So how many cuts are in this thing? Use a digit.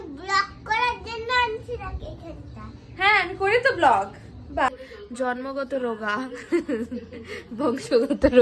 1